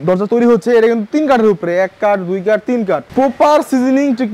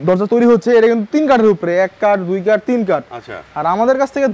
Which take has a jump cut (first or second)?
first